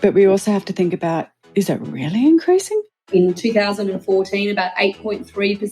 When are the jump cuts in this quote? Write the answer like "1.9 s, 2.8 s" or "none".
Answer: 3.0 s